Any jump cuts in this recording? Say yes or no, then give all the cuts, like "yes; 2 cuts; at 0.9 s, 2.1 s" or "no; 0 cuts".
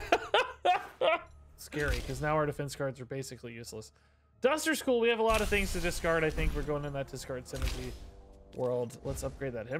no; 0 cuts